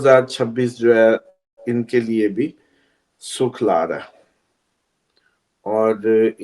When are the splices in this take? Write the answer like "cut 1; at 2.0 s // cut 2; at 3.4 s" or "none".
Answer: none